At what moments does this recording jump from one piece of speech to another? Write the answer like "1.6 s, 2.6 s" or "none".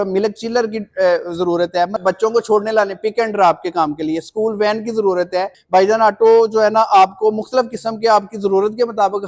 2.0 s, 5.6 s